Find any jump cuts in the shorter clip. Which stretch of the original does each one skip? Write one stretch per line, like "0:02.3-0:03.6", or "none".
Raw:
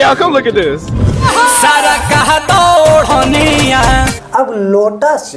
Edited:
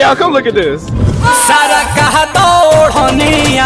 0:01.2-0:01.3